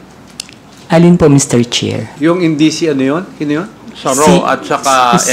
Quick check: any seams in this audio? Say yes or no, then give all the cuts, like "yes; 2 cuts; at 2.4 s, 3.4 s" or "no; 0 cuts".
no; 0 cuts